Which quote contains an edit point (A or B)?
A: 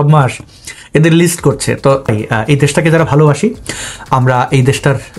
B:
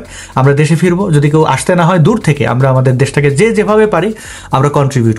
A